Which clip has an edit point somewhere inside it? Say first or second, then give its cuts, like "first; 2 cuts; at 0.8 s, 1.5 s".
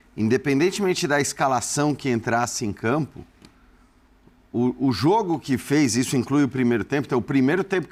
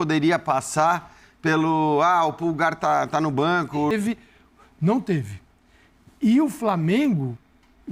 second; 1 cut; at 3.9 s